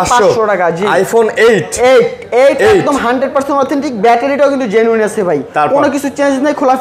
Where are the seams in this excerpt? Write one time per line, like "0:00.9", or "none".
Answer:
none